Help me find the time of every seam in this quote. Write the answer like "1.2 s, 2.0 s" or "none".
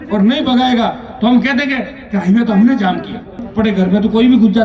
3.4 s